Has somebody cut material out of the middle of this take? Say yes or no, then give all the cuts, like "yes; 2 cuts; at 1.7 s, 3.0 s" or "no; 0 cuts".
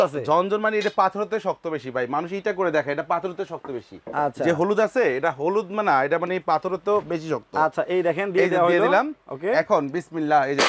no; 0 cuts